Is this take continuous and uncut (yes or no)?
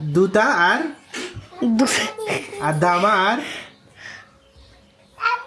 yes